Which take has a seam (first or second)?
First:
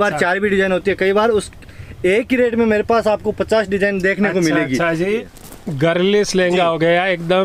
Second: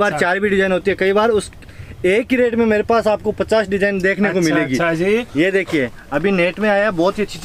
first